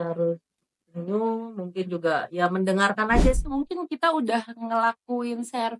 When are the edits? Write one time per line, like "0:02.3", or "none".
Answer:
0:03.4